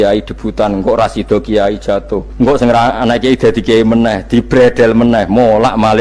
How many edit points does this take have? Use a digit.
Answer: 1